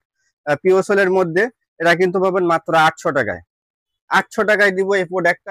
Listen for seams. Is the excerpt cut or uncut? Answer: uncut